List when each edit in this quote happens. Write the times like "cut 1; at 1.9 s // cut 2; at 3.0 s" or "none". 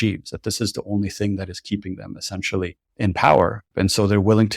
cut 1; at 2.8 s // cut 2; at 3.7 s